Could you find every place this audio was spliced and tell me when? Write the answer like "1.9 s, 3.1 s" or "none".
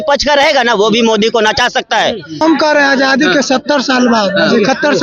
2.4 s